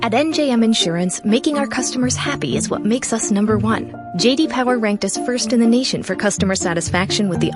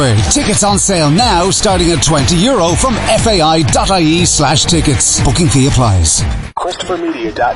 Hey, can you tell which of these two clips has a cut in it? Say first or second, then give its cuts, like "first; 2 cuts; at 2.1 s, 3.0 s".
second; 1 cut; at 6.5 s